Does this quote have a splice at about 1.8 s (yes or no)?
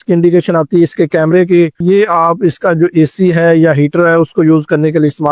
yes